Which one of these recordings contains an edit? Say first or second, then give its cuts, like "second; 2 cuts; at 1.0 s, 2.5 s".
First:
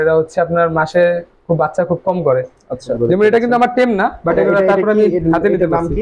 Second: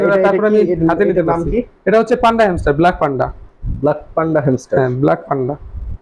first; 1 cut; at 2.9 s